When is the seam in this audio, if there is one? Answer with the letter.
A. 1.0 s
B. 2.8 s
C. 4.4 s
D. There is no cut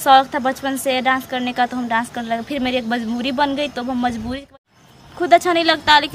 C